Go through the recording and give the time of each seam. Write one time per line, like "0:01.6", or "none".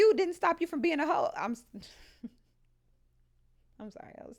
none